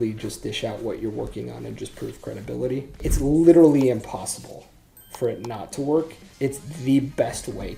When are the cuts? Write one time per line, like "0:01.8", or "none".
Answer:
0:03.0
0:06.2